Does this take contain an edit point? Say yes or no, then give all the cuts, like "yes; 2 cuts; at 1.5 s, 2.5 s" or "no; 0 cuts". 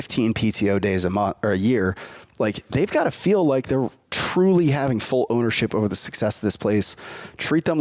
no; 0 cuts